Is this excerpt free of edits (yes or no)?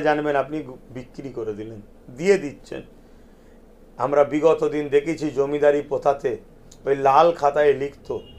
yes